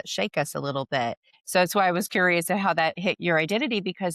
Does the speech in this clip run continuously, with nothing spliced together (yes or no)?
no